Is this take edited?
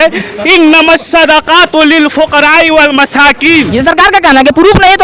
yes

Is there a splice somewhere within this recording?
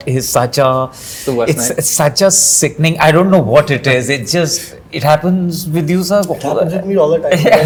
no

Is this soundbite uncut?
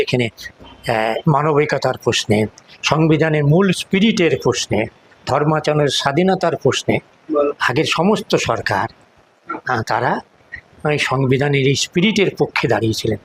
yes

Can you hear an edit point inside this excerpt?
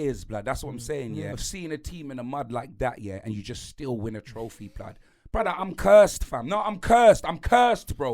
yes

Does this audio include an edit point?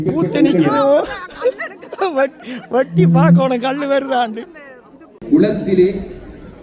yes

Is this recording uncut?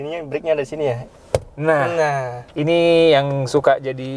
no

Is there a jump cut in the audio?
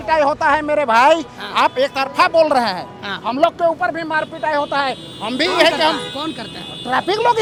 no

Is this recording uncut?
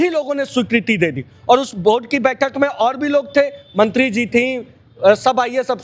yes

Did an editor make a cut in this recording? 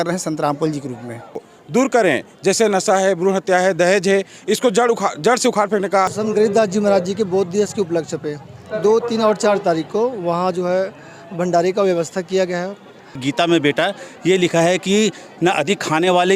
yes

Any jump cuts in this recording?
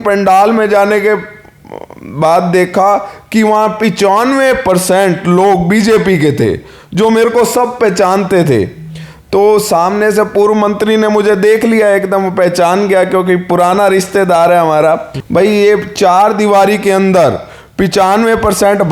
yes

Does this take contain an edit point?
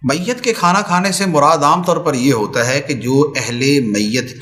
no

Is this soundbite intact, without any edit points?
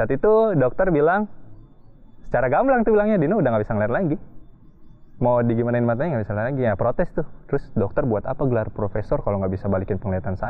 yes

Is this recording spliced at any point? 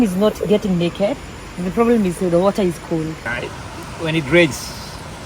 yes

